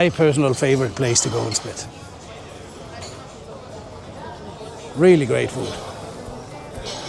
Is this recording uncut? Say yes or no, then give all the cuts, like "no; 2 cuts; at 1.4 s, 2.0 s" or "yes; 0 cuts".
yes; 0 cuts